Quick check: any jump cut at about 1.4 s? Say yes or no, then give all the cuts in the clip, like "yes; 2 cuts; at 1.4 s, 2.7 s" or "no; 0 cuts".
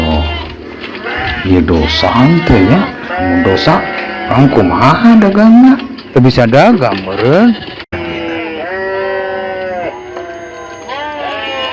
no; 1 cut; at 7.9 s